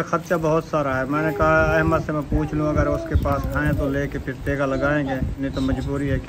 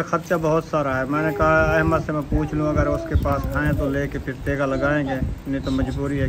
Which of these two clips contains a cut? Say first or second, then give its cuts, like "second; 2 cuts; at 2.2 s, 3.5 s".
first; 1 cut; at 5.3 s